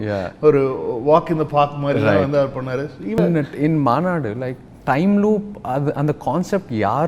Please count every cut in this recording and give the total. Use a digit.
1